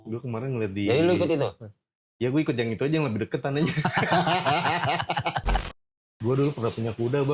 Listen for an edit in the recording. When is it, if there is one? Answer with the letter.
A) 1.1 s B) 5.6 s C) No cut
B